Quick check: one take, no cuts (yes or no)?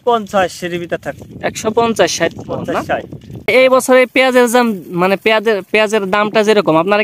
no